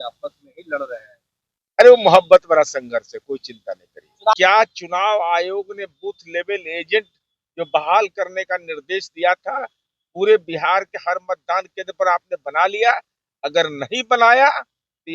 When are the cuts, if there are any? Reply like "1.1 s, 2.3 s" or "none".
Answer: 4.3 s